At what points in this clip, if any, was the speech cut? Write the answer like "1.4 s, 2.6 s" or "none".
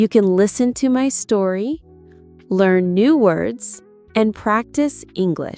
none